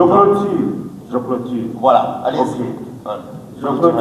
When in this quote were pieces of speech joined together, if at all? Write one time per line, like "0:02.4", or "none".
none